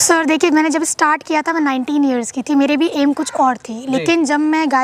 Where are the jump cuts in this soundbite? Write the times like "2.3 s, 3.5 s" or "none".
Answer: none